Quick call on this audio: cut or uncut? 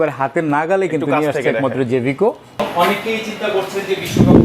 cut